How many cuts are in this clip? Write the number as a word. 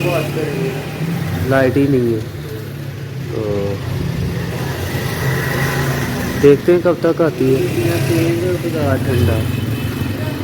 one